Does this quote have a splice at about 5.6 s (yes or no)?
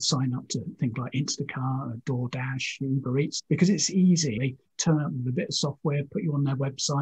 no